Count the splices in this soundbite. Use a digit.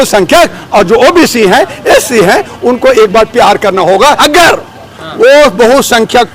1